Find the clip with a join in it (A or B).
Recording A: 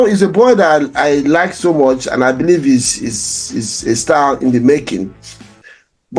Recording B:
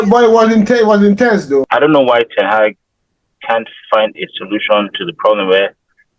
B